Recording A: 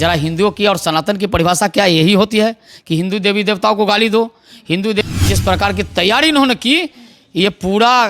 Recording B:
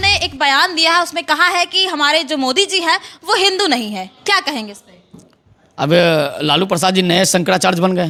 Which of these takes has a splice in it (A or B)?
A